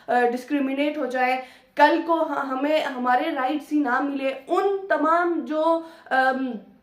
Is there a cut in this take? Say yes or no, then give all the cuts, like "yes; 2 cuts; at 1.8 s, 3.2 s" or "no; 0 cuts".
no; 0 cuts